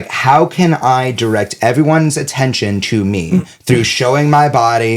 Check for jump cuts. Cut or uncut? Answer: uncut